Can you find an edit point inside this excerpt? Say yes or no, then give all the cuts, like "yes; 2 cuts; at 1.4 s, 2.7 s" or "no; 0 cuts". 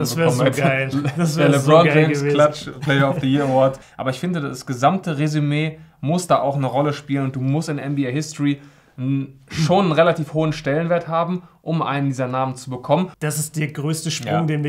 yes; 2 cuts; at 3.9 s, 13.1 s